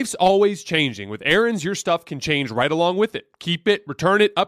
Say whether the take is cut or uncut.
uncut